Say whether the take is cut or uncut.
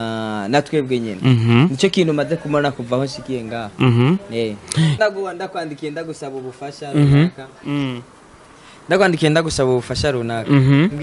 cut